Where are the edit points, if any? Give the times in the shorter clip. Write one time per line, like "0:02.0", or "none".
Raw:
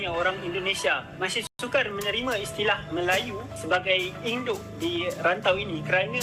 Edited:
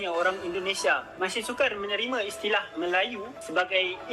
0:01.6

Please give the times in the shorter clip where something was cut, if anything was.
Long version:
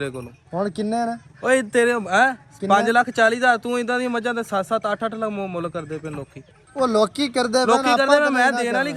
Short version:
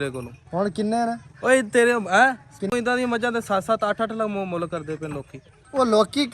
0:02.6

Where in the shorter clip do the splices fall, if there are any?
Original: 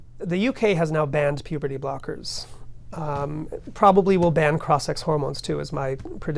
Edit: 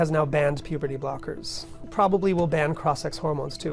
0:01.8

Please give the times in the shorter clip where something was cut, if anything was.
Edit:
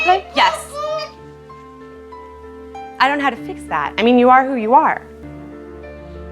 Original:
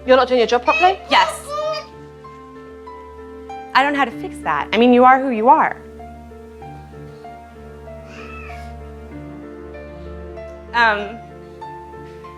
0:05.2

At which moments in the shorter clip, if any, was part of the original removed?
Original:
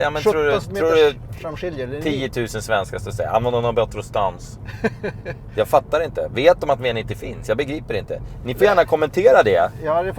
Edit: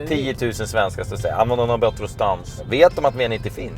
0:02.6

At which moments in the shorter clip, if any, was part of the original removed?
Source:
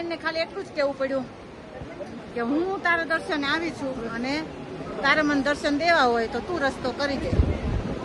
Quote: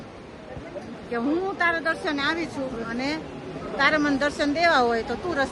none

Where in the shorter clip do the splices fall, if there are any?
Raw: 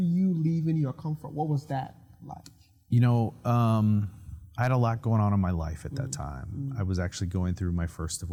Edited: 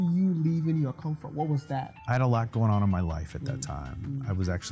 0:01.9

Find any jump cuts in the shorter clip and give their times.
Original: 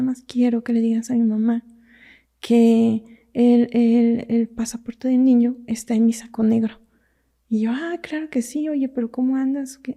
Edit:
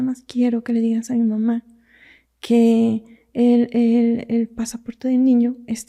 none

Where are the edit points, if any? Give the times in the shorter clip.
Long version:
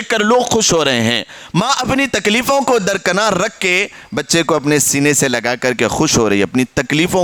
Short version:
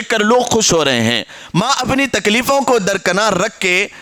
none

